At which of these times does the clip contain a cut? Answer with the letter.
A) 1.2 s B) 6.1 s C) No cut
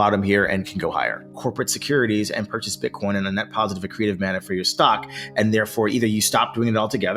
A